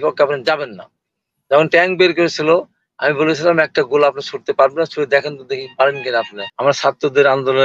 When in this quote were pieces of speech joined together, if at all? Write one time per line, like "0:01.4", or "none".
0:06.4